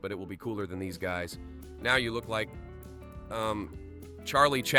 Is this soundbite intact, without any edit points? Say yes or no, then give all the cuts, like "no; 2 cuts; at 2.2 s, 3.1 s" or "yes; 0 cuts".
yes; 0 cuts